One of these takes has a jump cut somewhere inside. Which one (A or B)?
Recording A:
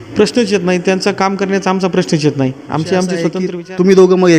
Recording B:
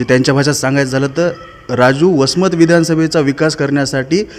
A